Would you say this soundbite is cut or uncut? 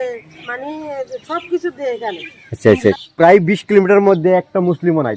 cut